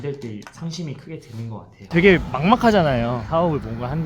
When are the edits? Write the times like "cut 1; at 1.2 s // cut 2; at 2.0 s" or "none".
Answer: cut 1; at 1.8 s